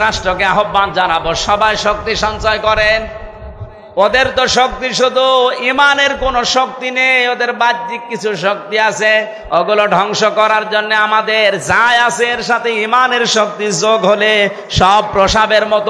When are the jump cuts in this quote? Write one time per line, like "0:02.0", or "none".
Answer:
none